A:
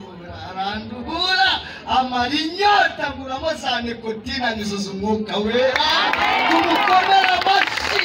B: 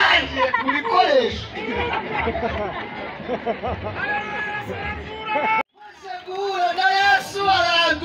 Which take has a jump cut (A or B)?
B